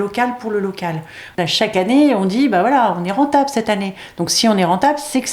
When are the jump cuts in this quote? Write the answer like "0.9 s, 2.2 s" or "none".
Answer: 1.2 s